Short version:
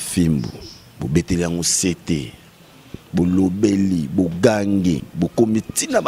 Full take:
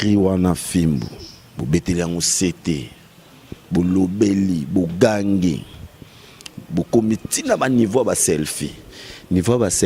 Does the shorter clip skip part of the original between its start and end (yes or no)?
yes